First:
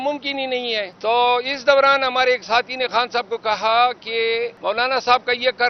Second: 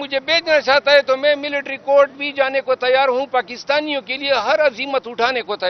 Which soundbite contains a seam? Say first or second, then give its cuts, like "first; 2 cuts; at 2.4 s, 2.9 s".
first; 2 cuts; at 0.9 s, 4.5 s